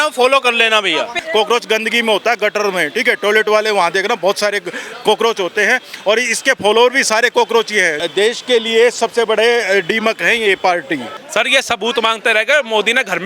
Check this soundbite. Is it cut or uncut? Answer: cut